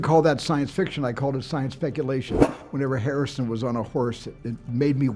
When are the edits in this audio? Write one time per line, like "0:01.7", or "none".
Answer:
0:02.4